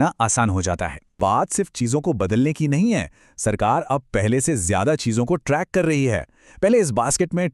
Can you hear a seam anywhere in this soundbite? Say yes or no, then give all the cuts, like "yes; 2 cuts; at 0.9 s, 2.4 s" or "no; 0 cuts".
yes; 1 cut; at 1.2 s